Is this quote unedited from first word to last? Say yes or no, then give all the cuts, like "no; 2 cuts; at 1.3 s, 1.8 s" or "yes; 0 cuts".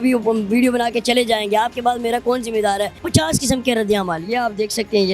no; 1 cut; at 3.0 s